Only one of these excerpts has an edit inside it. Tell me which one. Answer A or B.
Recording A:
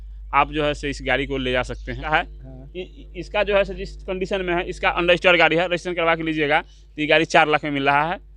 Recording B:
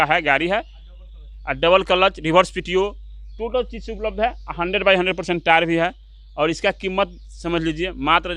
A